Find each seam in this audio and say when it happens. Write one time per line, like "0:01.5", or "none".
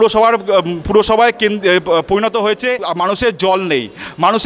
0:02.9